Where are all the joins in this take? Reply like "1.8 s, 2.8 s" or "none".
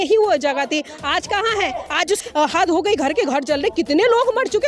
2.2 s